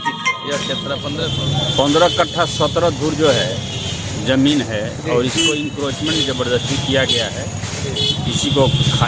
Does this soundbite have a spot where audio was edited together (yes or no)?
yes